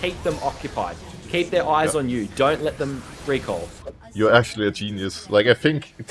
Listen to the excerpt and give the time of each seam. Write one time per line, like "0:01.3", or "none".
0:03.6